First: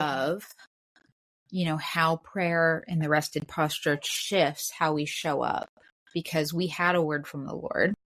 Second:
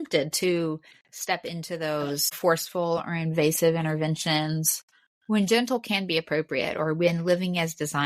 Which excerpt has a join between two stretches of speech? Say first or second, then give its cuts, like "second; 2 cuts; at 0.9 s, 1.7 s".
second; 1 cut; at 2.3 s